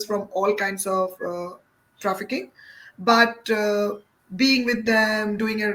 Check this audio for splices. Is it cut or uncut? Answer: uncut